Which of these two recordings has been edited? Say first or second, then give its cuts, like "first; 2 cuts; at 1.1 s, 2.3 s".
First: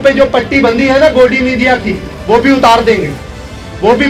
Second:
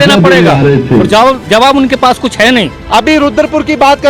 second; 1 cut; at 2.8 s